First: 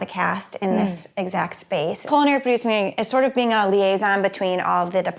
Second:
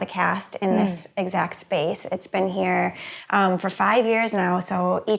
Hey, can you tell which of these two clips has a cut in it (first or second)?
first